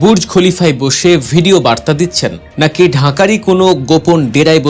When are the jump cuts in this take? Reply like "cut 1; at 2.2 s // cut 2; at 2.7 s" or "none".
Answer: none